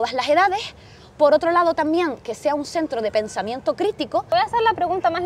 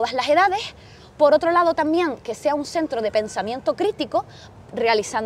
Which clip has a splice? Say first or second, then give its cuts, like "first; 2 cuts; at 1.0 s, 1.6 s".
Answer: first; 1 cut; at 4.3 s